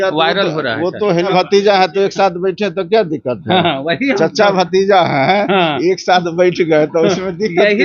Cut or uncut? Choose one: cut